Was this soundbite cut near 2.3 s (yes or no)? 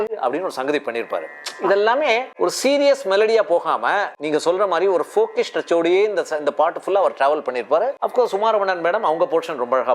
yes